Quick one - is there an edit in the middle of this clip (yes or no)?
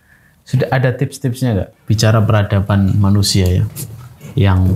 yes